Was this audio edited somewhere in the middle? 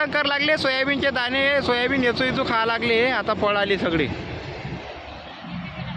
no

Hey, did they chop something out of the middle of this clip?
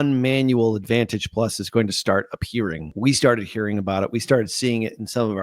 yes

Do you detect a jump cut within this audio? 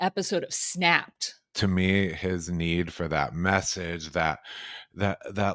yes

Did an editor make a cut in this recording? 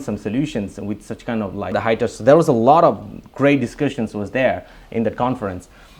yes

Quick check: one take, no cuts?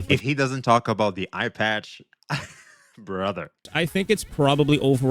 no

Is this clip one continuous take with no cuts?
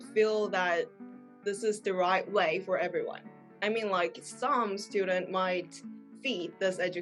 yes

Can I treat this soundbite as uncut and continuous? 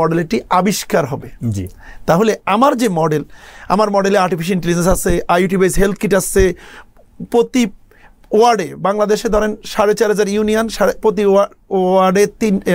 yes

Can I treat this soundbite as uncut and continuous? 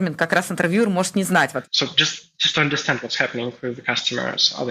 no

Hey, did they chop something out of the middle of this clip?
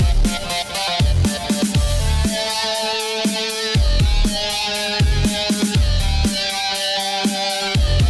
no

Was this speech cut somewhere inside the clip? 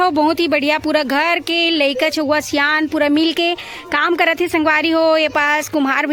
no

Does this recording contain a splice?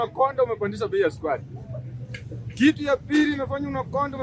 no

